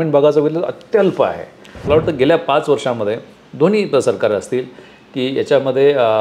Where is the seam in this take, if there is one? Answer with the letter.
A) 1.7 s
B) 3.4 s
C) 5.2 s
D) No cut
A